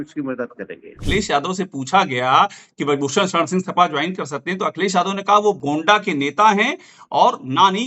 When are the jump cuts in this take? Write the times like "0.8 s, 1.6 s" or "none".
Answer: 1.0 s, 5.6 s